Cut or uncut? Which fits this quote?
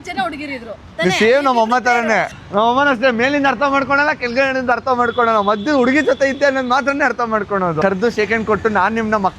cut